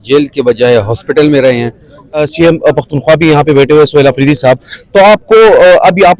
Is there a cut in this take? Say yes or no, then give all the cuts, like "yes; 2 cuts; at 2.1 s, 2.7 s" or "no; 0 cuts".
yes; 1 cut; at 2.2 s